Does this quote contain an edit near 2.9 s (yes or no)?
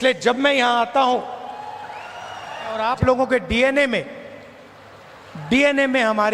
yes